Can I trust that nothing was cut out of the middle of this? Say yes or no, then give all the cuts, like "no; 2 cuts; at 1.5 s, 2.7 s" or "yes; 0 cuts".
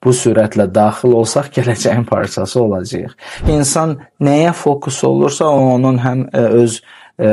no; 1 cut; at 3.4 s